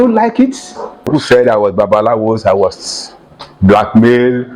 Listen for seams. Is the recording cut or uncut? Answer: cut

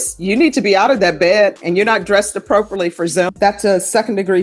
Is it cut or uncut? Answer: cut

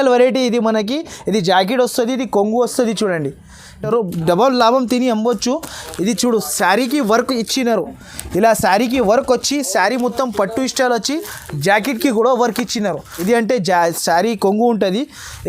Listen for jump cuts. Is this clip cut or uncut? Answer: cut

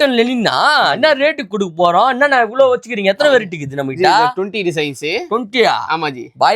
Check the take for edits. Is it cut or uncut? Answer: uncut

